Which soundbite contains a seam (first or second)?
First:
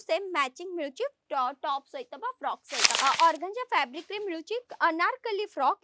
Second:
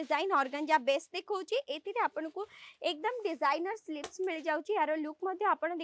first